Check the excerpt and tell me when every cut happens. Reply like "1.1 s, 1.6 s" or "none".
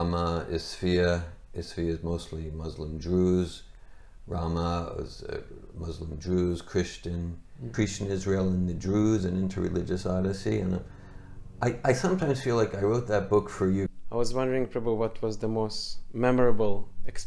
7.6 s, 14.0 s